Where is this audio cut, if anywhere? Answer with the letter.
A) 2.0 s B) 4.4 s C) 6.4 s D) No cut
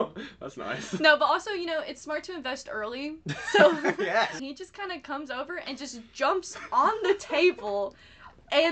B